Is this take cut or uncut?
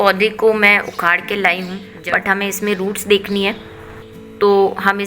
cut